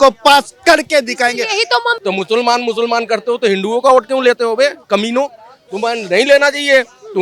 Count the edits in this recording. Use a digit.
1